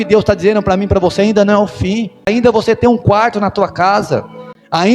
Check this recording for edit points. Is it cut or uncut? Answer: cut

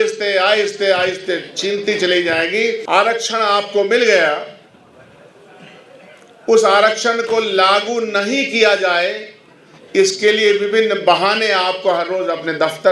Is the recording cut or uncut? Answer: cut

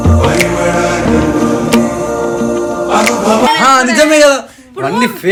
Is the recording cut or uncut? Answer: uncut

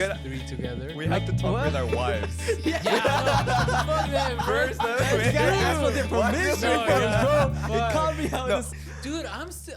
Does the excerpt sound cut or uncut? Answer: cut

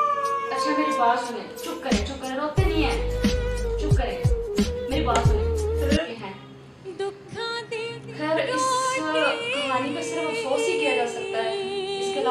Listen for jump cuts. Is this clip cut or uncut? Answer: cut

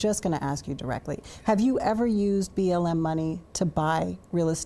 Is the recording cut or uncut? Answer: uncut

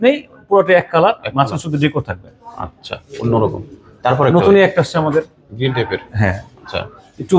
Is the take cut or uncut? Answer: uncut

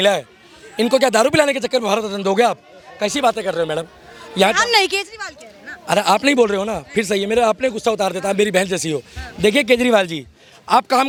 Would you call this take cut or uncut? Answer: uncut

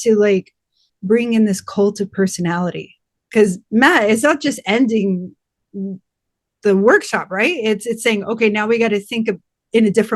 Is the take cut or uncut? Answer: cut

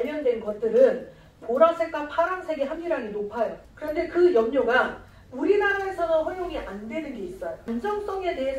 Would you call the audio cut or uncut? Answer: cut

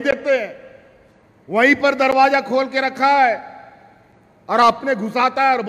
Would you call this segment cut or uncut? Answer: uncut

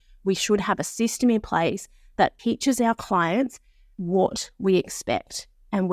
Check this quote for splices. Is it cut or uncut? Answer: uncut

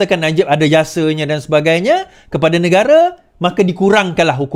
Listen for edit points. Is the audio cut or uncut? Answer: uncut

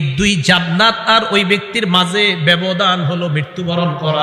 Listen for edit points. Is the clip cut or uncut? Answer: uncut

